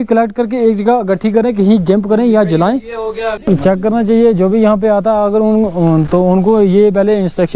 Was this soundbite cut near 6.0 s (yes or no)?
no